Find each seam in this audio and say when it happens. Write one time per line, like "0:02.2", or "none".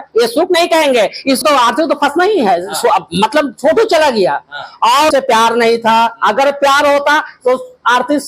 0:01.4
0:05.1

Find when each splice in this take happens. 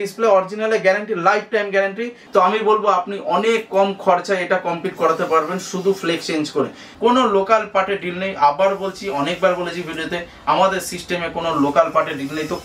0:02.1
0:06.8

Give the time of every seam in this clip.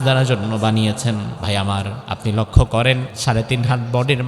0:01.4
0:02.0
0:03.1

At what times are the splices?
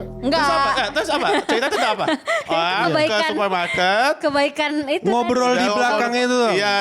none

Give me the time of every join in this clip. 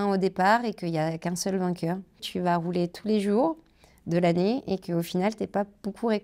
0:02.2

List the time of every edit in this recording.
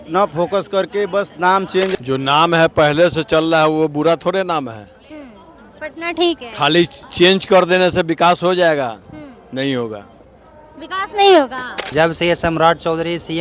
0:01.9
0:11.8

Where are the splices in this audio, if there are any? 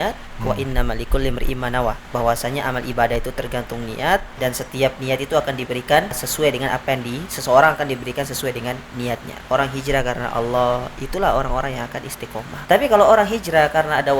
0:02.0
0:04.4
0:06.3
0:09.3
0:12.5

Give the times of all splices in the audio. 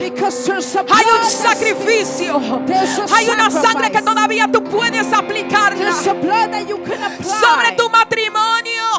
none

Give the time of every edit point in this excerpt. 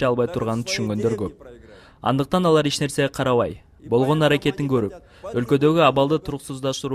0:02.1

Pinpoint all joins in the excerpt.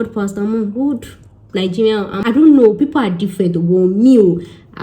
0:02.2

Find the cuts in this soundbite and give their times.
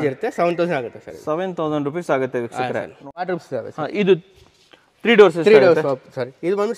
0:03.2

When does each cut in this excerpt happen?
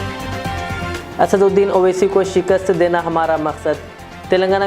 0:01.0

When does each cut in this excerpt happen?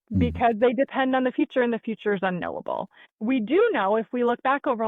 0:03.1

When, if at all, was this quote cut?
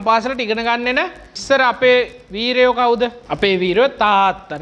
0:01.3
0:03.2

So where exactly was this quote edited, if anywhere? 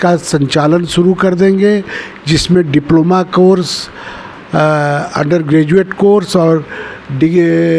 none

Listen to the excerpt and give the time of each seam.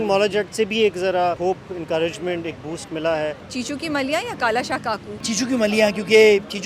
0:01.4
0:03.4
0:05.2

